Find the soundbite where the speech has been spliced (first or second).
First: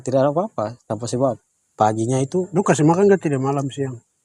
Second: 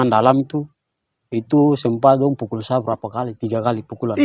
first